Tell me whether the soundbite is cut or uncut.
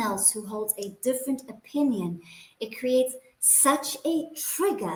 uncut